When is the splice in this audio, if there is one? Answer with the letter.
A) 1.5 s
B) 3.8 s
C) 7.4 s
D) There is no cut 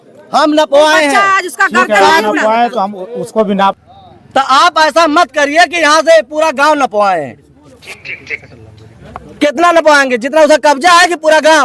B